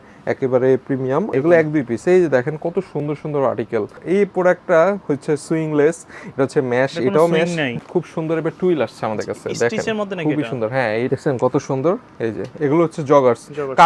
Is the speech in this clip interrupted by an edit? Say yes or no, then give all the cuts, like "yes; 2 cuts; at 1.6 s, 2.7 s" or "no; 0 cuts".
yes; 4 cuts; at 1.3 s, 4.0 s, 7.7 s, 11.1 s